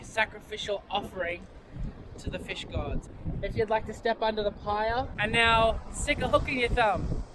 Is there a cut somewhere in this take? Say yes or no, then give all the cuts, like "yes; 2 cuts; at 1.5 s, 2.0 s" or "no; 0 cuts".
yes; 2 cuts; at 3.1 s, 5.1 s